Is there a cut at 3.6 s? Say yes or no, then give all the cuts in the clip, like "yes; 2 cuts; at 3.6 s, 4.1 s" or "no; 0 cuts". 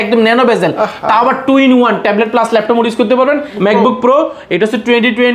yes; 1 cut; at 3.6 s